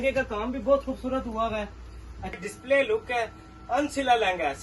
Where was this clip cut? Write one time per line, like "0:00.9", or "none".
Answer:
0:02.4